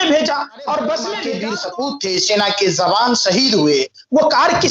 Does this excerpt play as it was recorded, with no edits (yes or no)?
no